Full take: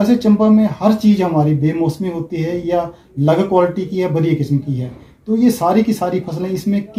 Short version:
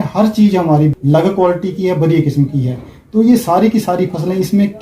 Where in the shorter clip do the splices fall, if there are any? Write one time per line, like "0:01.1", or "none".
0:00.9